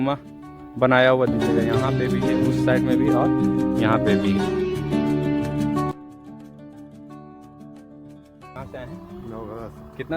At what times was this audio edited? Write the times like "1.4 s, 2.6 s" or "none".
8.6 s

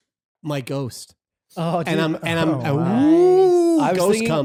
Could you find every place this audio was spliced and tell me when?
none

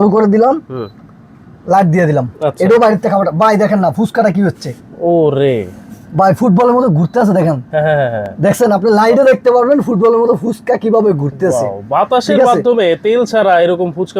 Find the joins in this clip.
none

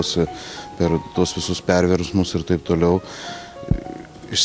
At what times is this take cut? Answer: none

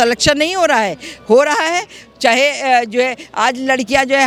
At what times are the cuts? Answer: none

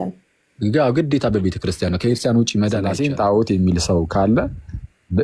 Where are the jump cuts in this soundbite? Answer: 2.9 s

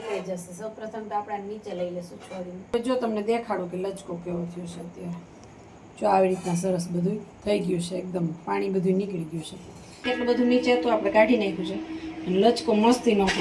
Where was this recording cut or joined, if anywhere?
2.7 s, 10.0 s

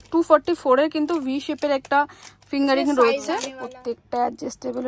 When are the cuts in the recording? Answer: 3.6 s

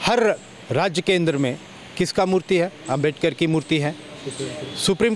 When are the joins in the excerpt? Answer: none

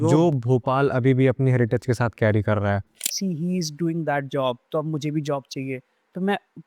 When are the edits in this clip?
2.9 s

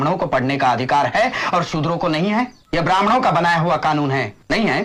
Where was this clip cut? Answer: none

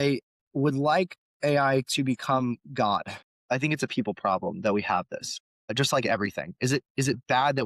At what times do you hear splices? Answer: 3.2 s

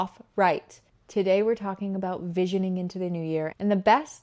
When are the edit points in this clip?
none

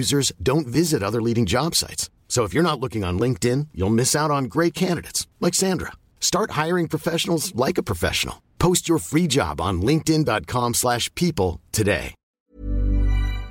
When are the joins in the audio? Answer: 12.2 s

